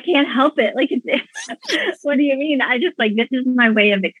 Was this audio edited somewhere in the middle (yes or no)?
no